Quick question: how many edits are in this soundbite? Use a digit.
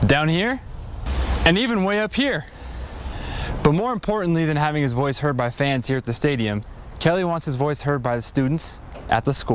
0